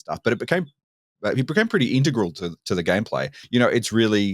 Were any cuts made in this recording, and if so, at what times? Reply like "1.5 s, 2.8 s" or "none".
3.4 s

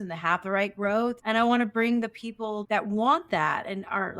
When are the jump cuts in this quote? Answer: 1.2 s, 2.6 s

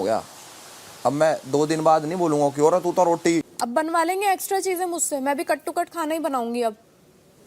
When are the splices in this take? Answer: 3.6 s

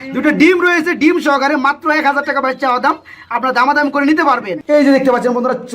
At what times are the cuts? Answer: 4.5 s

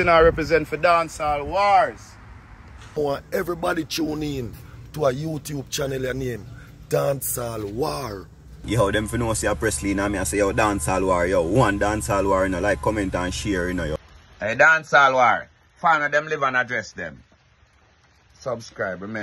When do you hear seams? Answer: 3.0 s, 8.6 s, 13.9 s

